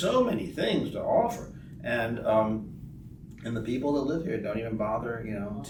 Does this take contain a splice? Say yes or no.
no